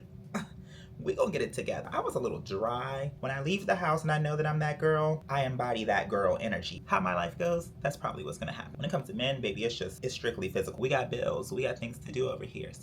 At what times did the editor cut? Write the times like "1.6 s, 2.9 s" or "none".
1.8 s, 3.1 s, 6.8 s, 8.8 s, 10.7 s